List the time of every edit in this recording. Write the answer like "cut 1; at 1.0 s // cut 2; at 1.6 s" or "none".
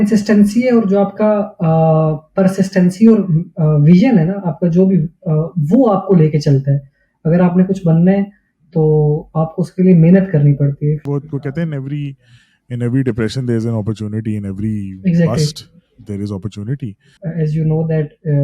cut 1; at 11.0 s // cut 2; at 17.2 s